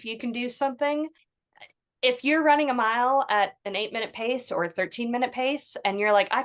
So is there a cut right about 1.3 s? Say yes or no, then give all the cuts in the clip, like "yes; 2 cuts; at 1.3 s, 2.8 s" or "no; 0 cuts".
yes; 1 cut; at 1.3 s